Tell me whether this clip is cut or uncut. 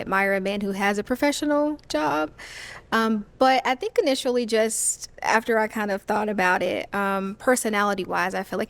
uncut